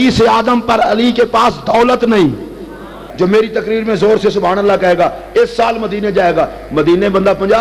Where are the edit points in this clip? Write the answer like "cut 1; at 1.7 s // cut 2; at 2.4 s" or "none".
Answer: cut 1; at 3.1 s